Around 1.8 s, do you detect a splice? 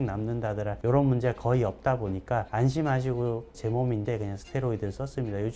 no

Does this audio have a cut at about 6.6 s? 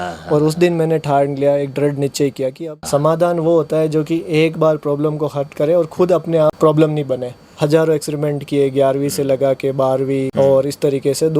yes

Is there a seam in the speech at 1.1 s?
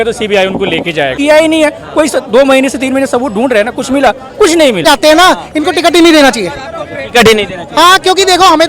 yes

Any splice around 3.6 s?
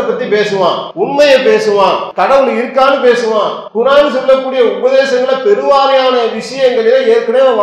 yes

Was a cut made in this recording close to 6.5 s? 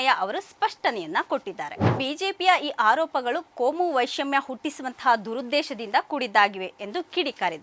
no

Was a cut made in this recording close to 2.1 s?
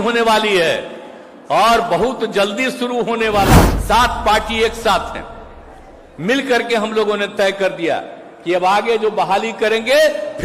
no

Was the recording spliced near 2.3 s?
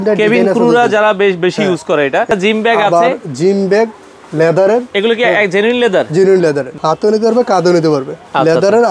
yes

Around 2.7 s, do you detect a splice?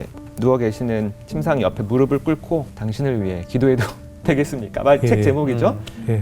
yes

